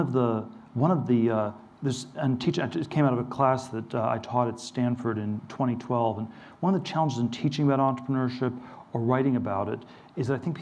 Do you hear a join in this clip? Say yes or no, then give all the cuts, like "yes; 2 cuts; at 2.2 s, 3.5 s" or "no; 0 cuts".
no; 0 cuts